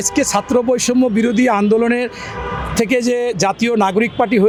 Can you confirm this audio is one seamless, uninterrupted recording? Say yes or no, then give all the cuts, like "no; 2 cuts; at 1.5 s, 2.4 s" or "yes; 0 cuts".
yes; 0 cuts